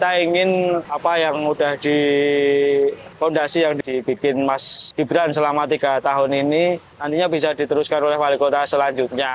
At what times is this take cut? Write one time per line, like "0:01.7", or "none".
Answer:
0:03.8
0:04.8
0:06.9